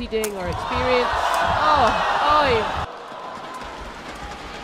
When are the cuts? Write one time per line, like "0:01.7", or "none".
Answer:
0:02.9